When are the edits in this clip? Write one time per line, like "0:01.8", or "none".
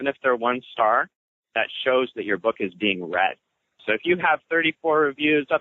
0:03.8